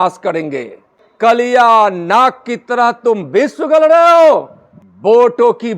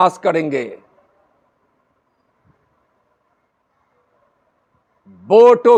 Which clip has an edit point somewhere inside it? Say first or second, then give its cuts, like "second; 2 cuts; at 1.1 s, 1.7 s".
first; 2 cuts; at 1.2 s, 5.1 s